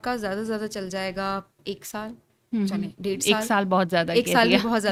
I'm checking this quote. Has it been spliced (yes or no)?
no